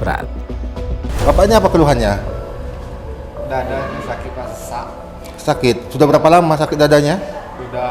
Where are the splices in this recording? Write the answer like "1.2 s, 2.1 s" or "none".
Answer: 1.1 s